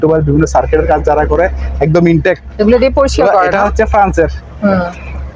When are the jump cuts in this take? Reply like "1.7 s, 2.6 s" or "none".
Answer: none